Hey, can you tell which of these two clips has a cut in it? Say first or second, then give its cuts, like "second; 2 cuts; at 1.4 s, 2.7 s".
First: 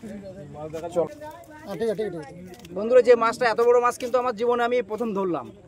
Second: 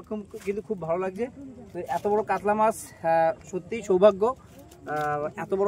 first; 1 cut; at 1.1 s